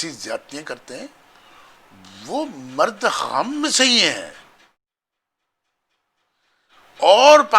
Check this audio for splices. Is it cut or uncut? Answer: uncut